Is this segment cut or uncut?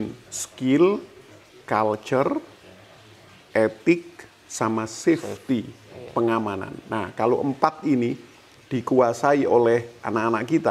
uncut